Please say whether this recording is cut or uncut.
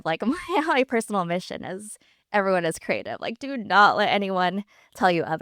uncut